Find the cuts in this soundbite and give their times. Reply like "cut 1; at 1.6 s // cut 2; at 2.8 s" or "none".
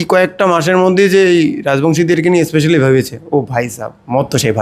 none